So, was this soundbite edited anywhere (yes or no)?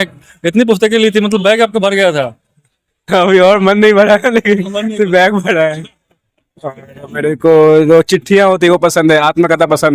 no